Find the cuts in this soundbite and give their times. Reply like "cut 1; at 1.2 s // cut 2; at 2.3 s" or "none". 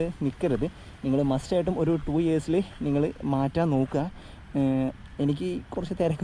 none